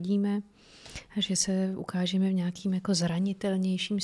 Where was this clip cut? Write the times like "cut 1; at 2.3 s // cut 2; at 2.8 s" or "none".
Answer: none